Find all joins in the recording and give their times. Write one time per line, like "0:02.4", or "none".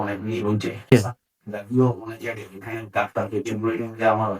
0:00.9